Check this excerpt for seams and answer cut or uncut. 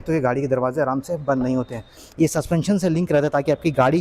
cut